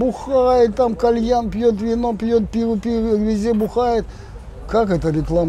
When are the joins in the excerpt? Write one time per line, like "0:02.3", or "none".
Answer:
none